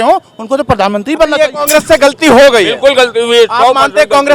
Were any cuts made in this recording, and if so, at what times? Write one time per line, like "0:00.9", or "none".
0:01.6